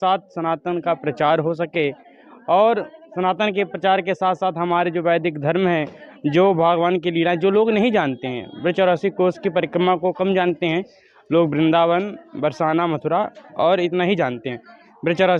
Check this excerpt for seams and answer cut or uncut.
uncut